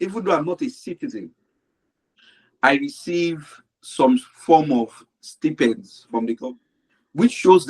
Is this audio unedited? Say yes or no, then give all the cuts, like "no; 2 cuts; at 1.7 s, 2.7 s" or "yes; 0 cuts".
no; 1 cut; at 6.4 s